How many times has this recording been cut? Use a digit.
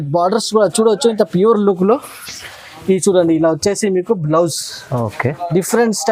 0